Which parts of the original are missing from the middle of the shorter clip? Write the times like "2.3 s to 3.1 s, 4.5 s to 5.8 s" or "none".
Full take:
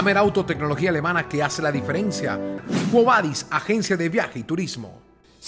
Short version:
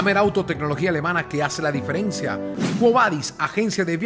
2.5 s to 2.6 s